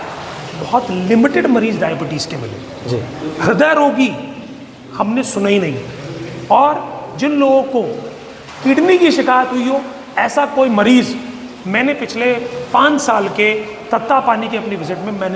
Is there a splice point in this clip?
no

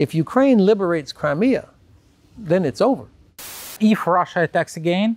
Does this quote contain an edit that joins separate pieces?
yes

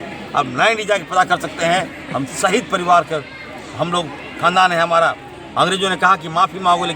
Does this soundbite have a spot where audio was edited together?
no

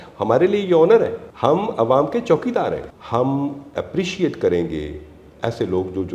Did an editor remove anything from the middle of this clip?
yes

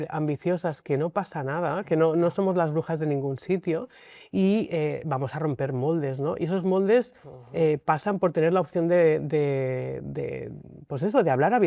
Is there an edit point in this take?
no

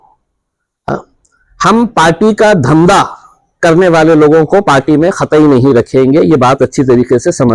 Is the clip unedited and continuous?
yes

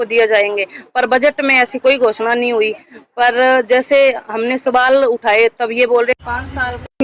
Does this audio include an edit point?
no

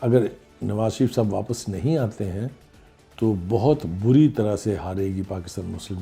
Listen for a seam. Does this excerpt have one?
no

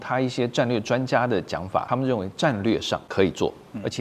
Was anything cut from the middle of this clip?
yes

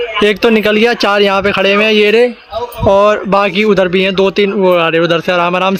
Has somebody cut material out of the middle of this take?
no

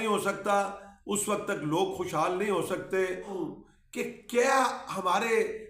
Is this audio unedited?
no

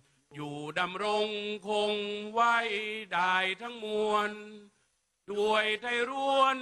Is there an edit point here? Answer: no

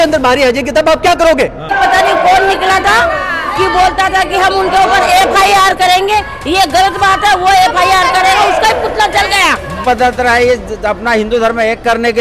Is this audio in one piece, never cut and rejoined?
no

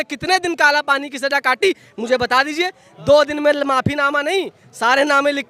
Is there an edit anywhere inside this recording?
no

